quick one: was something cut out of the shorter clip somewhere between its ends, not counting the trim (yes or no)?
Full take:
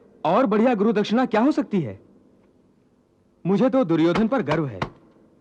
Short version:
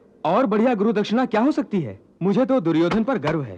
yes